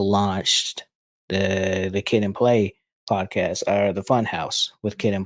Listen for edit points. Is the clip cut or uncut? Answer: uncut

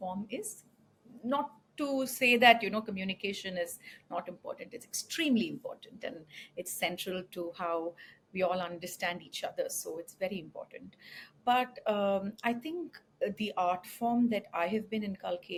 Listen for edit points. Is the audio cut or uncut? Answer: uncut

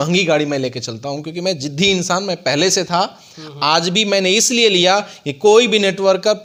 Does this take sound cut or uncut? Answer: uncut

